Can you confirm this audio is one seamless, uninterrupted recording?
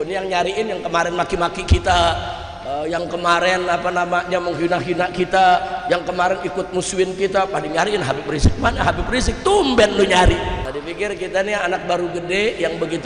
no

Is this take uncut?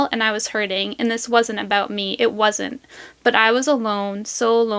yes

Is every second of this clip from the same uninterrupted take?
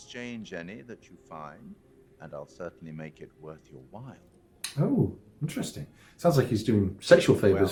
yes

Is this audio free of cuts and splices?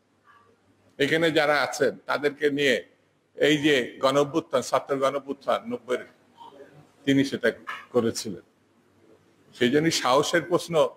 yes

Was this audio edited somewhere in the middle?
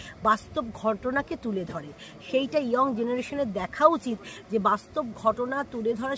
no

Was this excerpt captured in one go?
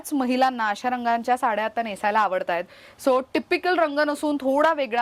yes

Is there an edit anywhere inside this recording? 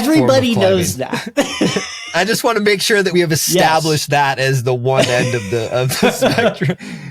yes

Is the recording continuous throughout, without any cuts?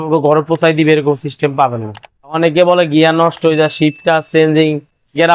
no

